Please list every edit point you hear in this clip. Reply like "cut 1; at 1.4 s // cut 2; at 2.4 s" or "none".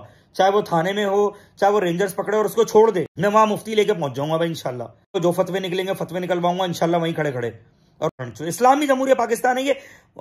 cut 1; at 3.1 s // cut 2; at 5.2 s // cut 3; at 8.1 s